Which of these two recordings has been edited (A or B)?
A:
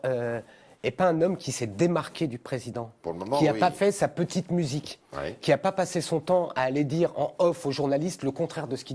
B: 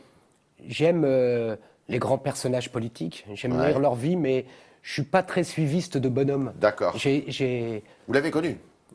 A